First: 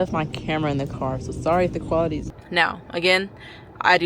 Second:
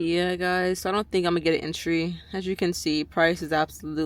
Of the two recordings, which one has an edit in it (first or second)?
first